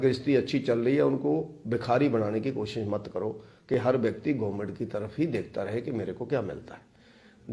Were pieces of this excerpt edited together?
no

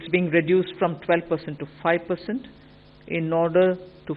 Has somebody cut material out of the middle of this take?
no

